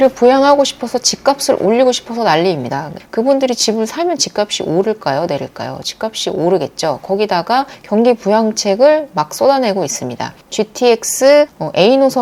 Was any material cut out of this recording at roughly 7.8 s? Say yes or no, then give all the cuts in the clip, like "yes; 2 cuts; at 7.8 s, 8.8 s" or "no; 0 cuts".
no; 1 cut; at 3.0 s